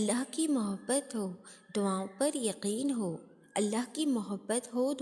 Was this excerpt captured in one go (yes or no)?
yes